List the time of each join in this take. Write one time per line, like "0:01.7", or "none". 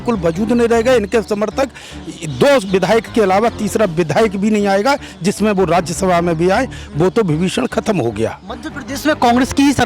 none